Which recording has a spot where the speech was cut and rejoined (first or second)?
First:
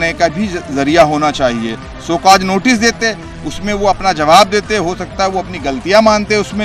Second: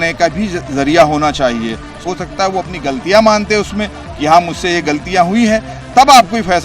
second